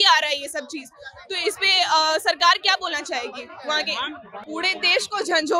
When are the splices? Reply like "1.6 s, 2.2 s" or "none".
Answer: 4.3 s